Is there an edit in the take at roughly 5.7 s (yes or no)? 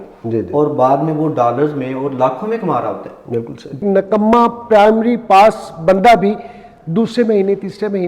no